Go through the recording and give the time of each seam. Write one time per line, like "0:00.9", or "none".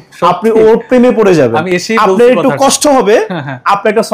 none